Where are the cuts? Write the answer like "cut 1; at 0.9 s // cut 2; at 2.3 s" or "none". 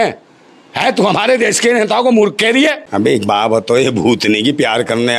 cut 1; at 2.8 s